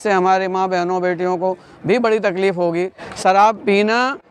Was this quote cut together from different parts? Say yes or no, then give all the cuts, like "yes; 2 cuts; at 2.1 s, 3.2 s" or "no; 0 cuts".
no; 0 cuts